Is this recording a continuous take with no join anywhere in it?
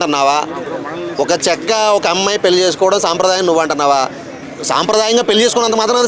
yes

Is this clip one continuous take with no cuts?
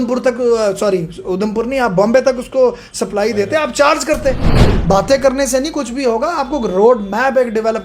no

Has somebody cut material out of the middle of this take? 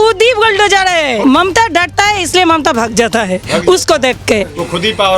yes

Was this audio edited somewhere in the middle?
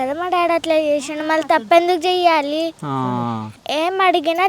yes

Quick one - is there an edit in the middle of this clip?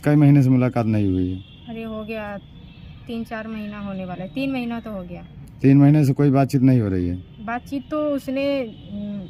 no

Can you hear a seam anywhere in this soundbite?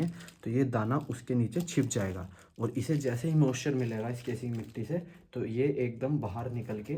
no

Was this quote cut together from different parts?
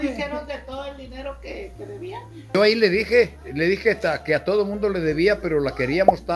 yes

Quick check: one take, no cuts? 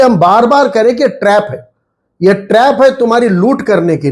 yes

